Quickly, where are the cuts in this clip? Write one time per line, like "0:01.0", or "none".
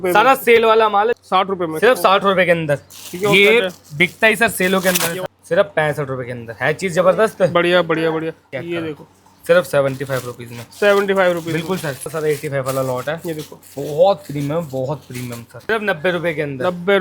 0:01.1
0:05.1
0:08.4
0:12.1
0:15.7